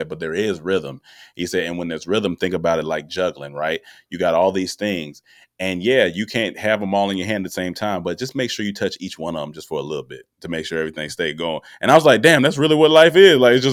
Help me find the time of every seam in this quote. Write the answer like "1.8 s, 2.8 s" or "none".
none